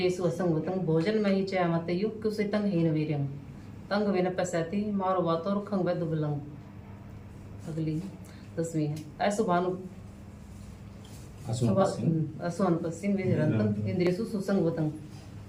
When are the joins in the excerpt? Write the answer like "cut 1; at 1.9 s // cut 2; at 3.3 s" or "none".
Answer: none